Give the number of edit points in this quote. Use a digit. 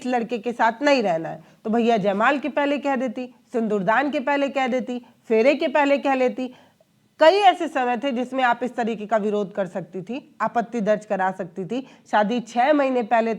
0